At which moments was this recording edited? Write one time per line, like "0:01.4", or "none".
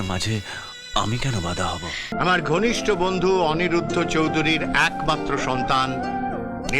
0:02.1